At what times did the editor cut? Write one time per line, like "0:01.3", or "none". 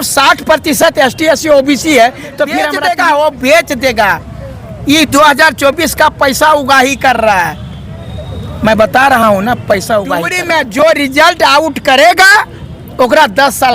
0:02.7
0:10.4